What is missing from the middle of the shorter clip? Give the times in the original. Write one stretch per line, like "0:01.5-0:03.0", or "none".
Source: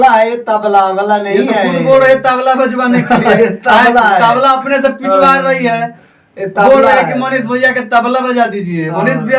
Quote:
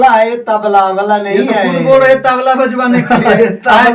none

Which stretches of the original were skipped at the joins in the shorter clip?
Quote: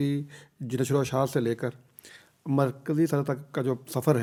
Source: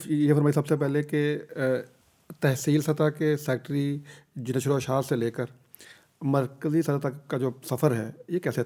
none

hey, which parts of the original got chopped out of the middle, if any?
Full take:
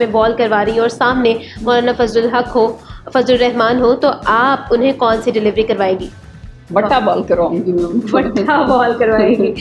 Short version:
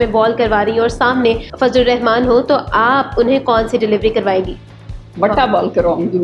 0:01.5-0:03.0

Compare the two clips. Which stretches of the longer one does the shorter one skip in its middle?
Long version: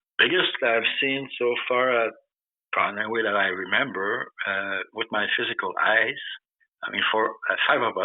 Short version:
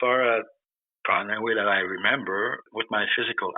0:04.3-0:04.9

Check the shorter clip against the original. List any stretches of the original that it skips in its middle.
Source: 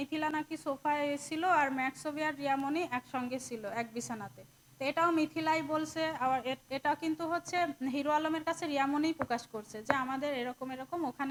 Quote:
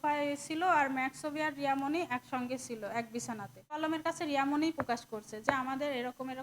0:04.6-0:08.2

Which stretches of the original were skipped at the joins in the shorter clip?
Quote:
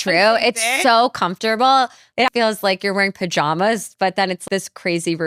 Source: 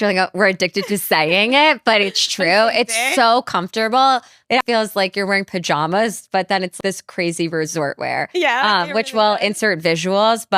none

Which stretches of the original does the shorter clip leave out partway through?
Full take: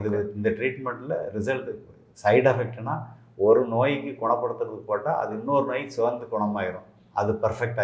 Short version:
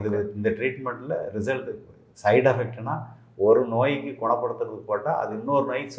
none

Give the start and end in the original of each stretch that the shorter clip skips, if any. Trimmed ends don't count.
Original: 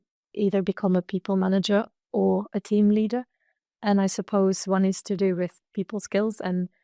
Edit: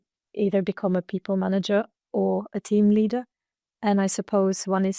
none

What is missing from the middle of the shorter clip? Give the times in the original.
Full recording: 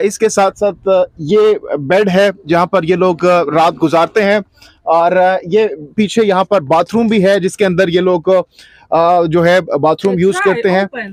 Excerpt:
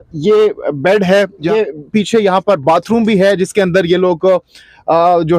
0:02.5-0:05.5

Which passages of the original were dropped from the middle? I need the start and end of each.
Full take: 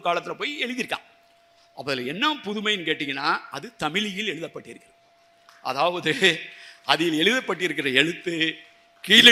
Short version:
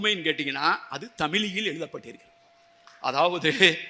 none

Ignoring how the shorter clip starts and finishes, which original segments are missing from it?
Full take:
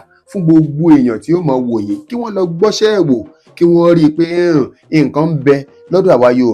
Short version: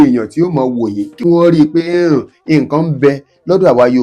0:02.2-0:03.7

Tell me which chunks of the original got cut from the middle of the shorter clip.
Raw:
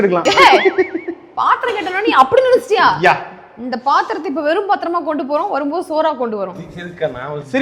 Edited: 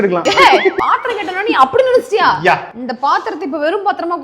0:00.8-0:01.3
0:03.4-0:03.6

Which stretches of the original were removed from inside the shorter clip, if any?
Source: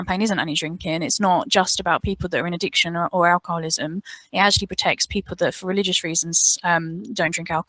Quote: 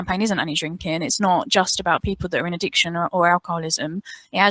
none

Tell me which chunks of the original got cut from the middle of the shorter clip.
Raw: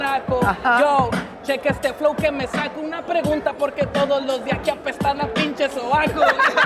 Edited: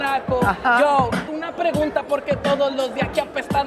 0:01.3-0:02.8

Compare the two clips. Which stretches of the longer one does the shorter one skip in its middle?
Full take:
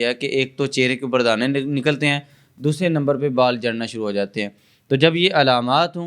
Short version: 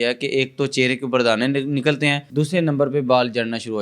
0:02.2-0:02.5

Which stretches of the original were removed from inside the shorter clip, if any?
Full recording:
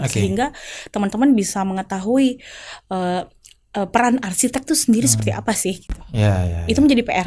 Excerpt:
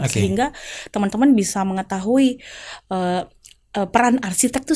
none

